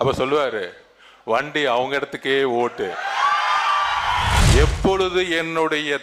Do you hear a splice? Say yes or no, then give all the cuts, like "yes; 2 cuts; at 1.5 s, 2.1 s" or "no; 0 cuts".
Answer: yes; 1 cut; at 4.4 s